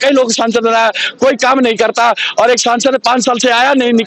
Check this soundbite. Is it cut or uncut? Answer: uncut